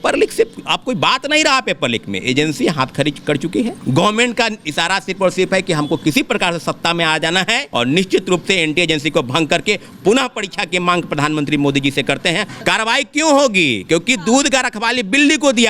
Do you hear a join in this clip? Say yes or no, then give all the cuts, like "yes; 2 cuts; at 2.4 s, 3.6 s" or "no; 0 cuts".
yes; 3 cuts; at 3.8 s, 7.6 s, 12.5 s